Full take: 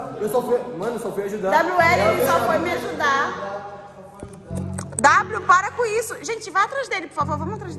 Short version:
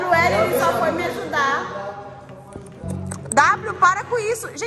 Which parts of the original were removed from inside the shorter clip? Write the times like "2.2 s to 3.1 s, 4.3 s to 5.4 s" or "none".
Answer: none